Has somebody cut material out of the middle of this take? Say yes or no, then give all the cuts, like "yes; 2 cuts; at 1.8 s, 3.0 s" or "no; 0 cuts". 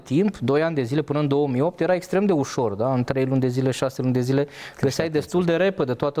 no; 0 cuts